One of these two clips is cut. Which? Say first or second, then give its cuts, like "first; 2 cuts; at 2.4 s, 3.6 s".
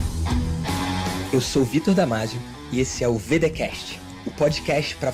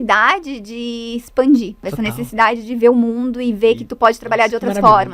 second; 1 cut; at 1.8 s